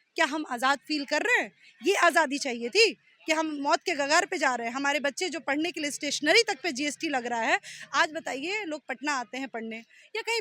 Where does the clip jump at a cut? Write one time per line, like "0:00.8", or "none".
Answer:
none